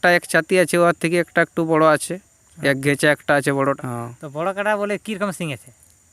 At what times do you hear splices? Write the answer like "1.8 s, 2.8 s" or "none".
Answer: 3.8 s